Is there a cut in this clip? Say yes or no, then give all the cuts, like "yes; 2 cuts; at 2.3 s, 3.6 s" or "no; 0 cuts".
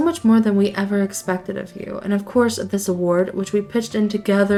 no; 0 cuts